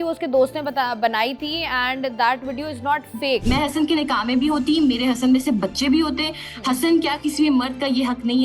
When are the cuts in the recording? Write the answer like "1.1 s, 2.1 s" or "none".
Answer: 3.4 s